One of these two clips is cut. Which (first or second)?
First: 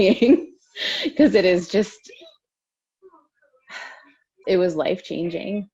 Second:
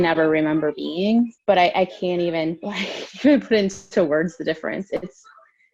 second